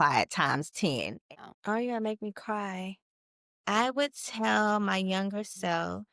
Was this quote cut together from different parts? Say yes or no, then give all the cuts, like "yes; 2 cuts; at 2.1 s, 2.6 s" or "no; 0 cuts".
yes; 1 cut; at 1.3 s